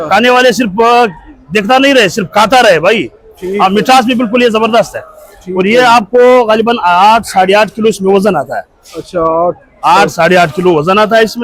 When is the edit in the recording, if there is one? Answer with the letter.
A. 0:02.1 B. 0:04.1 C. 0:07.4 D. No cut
D